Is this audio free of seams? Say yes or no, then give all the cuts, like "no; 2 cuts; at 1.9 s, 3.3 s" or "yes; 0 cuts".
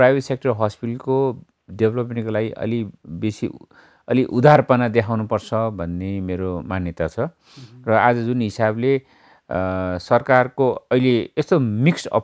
yes; 0 cuts